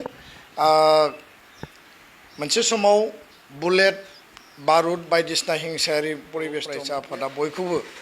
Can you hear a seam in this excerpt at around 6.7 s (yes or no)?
yes